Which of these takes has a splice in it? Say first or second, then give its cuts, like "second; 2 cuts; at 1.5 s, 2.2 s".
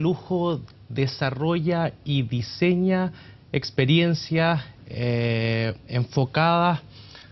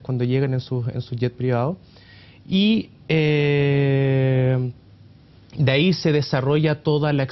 first; 1 cut; at 4.0 s